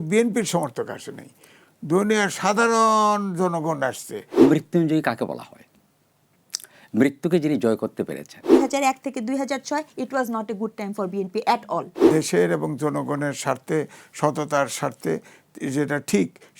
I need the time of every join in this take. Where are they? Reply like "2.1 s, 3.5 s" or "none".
4.4 s, 8.5 s, 12.0 s